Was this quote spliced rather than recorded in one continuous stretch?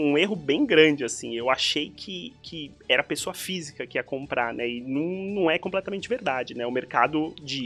no; 0 cuts

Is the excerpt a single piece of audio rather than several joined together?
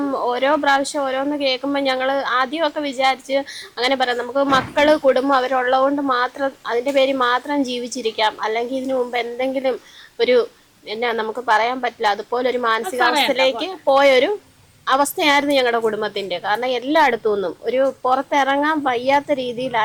yes; 0 cuts

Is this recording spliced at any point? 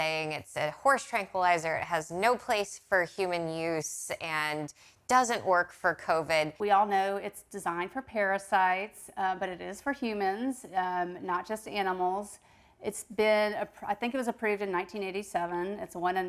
yes; 1 cut; at 6.5 s

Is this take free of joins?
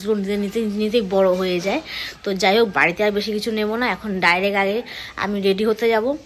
yes; 0 cuts

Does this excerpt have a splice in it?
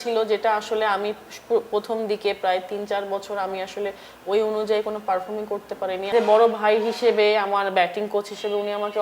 yes; 1 cut; at 6.1 s

